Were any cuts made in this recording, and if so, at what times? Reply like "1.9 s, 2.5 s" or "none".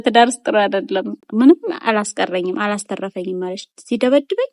1.2 s